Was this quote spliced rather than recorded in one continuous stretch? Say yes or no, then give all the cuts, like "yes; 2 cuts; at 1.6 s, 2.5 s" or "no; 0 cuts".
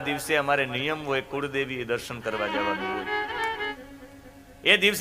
yes; 1 cut; at 3.7 s